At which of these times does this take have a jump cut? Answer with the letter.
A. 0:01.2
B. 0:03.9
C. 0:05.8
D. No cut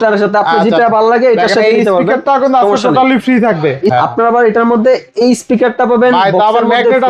B